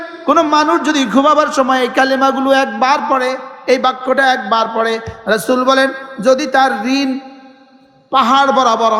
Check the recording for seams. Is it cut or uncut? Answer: uncut